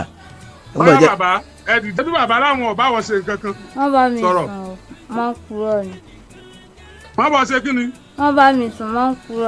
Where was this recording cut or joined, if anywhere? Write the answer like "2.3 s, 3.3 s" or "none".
2.0 s